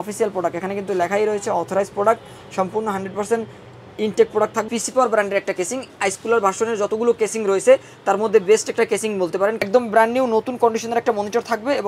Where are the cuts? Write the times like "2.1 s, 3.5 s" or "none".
4.6 s, 9.6 s